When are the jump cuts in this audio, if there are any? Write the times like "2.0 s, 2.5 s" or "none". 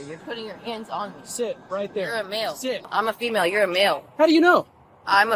2.9 s